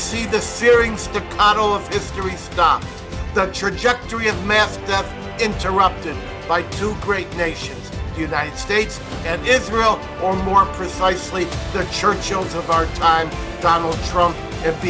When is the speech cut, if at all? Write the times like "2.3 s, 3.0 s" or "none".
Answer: none